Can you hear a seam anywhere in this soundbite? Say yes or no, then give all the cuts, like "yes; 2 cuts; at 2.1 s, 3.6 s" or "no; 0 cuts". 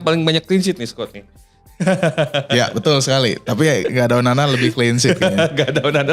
no; 0 cuts